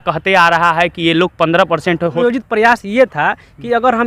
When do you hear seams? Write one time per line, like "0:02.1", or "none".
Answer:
0:02.2